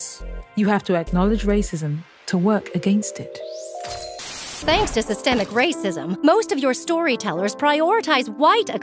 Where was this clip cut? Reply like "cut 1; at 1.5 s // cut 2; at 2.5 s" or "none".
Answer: cut 1; at 4.4 s

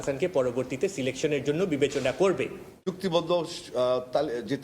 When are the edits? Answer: cut 1; at 2.5 s

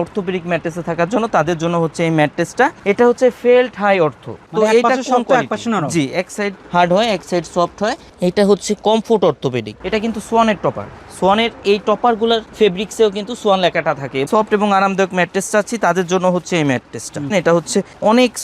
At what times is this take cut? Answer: cut 1; at 2.8 s // cut 2; at 4.4 s // cut 3; at 9.7 s // cut 4; at 14.2 s // cut 5; at 17.3 s

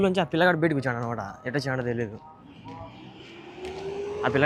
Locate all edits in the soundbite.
none

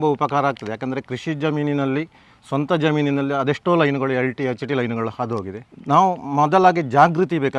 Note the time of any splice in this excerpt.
none

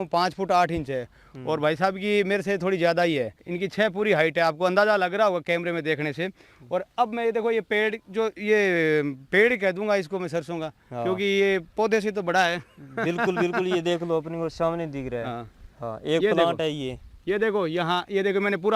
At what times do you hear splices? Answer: cut 1; at 3.4 s

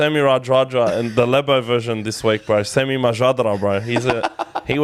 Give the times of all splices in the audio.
none

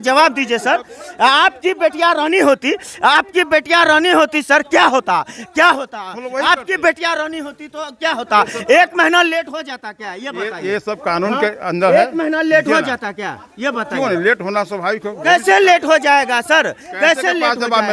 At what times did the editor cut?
none

